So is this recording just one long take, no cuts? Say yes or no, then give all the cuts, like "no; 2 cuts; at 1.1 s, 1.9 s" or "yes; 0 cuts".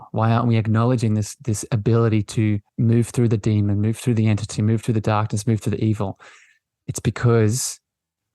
no; 1 cut; at 2.7 s